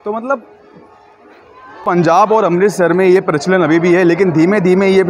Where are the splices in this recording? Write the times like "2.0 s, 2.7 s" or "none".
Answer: 1.8 s